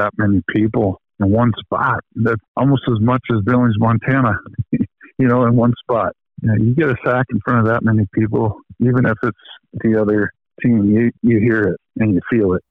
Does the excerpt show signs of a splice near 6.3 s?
yes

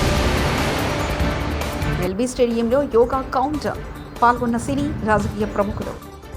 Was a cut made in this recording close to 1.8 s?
yes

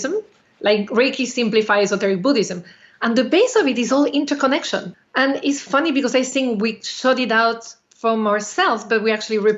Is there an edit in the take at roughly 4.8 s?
yes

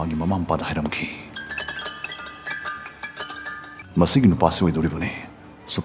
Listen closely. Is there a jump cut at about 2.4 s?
no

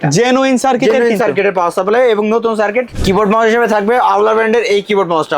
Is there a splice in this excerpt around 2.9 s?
yes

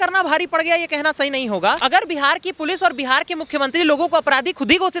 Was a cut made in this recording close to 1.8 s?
yes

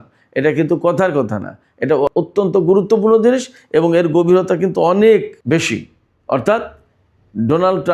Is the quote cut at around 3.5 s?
no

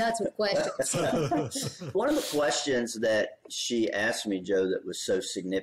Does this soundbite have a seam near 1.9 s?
yes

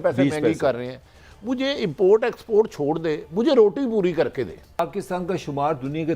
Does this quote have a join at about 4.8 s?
yes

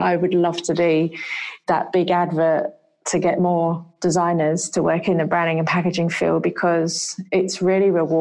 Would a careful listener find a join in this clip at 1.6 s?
no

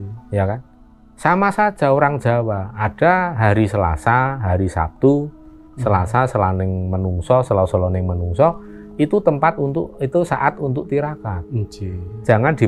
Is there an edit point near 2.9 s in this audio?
no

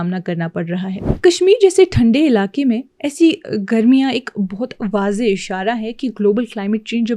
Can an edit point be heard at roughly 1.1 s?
yes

